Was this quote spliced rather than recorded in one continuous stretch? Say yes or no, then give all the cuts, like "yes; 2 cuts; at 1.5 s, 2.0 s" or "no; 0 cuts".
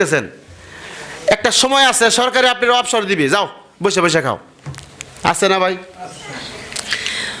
no; 0 cuts